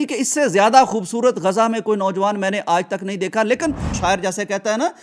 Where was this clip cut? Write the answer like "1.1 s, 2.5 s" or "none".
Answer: 3.9 s